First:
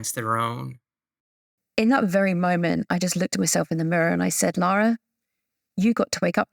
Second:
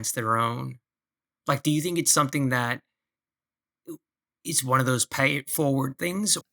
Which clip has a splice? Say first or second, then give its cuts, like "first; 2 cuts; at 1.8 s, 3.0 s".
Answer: first; 1 cut; at 1.5 s